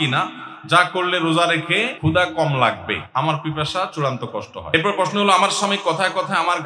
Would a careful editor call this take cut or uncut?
cut